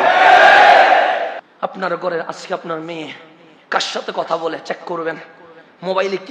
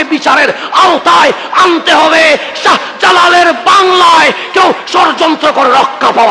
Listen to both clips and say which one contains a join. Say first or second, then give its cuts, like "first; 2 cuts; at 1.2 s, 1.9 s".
first; 1 cut; at 1.4 s